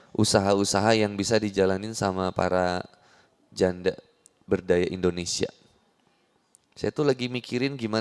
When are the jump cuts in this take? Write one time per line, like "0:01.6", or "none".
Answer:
none